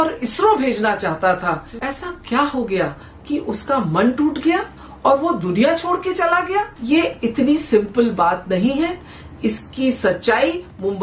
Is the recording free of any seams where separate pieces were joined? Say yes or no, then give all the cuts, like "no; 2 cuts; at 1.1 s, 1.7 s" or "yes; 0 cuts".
yes; 0 cuts